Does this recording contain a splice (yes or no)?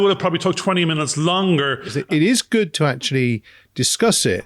yes